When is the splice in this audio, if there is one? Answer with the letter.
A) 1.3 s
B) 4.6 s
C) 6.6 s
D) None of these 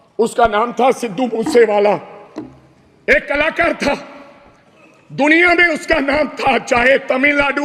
D